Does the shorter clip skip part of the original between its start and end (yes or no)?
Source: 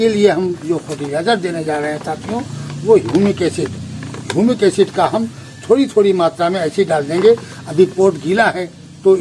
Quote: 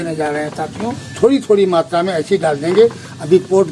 yes